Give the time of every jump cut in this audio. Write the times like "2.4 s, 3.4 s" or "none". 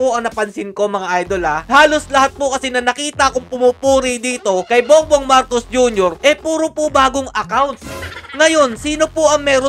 1.6 s